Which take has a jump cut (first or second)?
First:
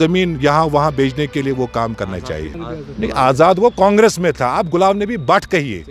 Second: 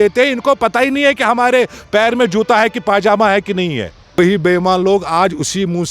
second